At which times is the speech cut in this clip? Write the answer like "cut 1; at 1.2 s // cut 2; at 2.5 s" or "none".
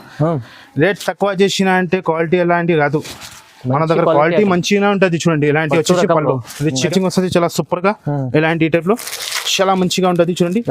cut 1; at 6.9 s